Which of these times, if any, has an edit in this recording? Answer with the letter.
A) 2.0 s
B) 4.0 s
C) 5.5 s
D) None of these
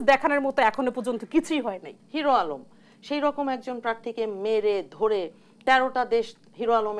A